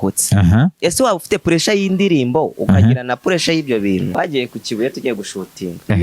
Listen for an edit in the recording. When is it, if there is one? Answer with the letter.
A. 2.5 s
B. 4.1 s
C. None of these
B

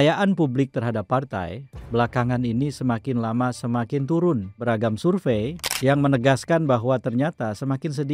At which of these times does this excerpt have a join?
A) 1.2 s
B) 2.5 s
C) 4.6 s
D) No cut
C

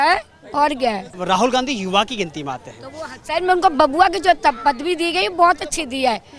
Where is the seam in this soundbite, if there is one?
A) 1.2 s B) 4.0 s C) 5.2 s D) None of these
A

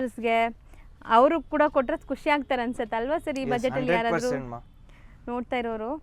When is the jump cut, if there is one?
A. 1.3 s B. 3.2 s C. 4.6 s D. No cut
D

